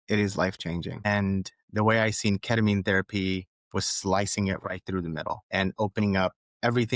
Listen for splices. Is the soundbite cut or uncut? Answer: cut